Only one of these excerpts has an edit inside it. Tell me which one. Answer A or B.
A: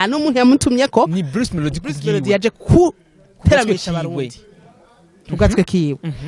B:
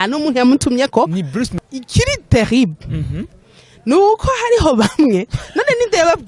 B